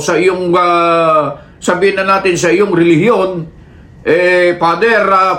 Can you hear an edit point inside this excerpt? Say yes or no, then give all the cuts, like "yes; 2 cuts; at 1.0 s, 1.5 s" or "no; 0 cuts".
no; 0 cuts